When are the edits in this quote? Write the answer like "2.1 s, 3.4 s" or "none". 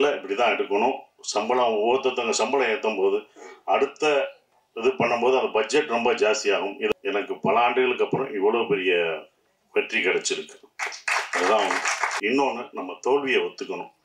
6.9 s, 12.1 s